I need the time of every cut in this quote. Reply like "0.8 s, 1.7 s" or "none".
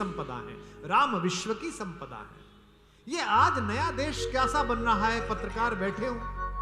none